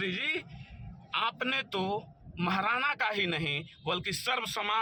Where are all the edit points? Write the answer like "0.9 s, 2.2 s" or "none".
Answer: none